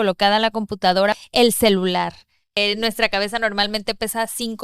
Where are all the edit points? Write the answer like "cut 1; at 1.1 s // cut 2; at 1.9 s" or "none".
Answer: cut 1; at 1.1 s // cut 2; at 2.6 s